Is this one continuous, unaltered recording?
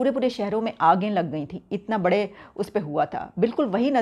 yes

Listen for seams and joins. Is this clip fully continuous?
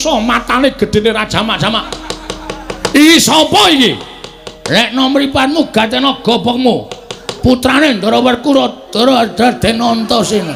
yes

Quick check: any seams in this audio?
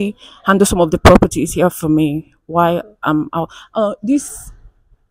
no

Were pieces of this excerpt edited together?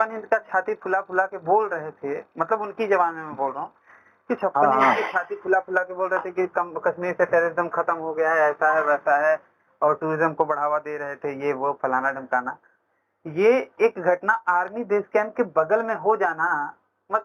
no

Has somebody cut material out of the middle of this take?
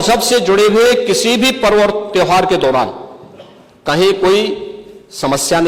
no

